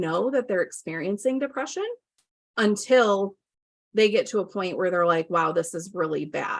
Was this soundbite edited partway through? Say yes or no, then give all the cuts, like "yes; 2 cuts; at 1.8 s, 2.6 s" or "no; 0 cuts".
no; 0 cuts